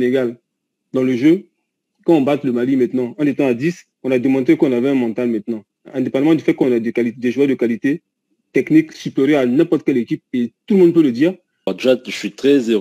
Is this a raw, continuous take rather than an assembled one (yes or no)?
no